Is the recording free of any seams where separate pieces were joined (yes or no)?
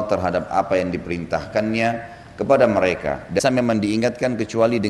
no